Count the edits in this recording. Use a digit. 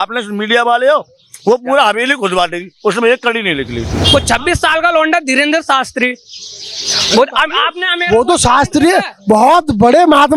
1